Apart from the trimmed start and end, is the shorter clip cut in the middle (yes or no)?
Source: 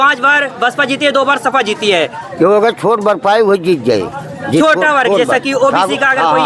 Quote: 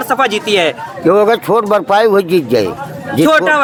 no